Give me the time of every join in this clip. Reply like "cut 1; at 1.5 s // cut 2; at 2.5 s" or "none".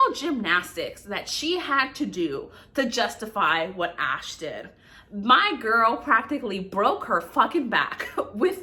none